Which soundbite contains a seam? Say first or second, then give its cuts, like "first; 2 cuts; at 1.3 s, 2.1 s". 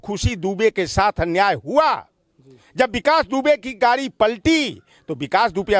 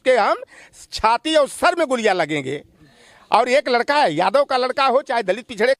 second; 1 cut; at 2.8 s